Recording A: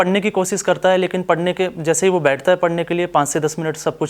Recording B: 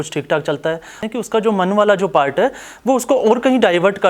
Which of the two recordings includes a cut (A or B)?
B